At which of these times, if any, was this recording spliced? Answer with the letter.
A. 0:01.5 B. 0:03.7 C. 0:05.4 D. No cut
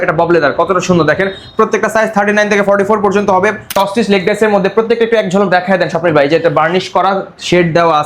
B